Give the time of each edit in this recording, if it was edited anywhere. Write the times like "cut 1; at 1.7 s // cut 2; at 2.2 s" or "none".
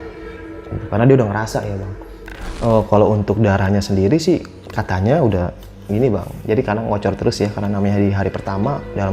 cut 1; at 2.1 s